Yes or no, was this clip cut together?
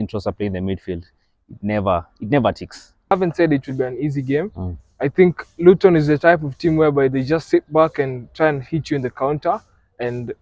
yes